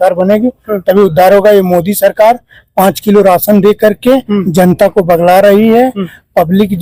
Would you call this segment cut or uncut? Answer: uncut